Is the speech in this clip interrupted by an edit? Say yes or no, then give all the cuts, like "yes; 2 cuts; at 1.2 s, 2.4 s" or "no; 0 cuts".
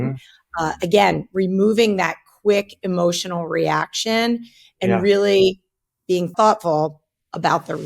yes; 1 cut; at 6.3 s